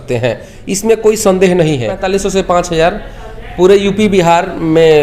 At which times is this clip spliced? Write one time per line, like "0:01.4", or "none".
0:02.1